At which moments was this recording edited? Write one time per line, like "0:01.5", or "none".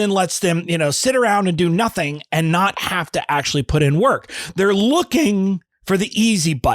0:05.7